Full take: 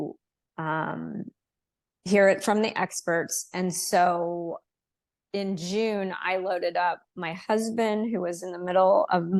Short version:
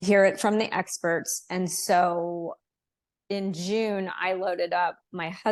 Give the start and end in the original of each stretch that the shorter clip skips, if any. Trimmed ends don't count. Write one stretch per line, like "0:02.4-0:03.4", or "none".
none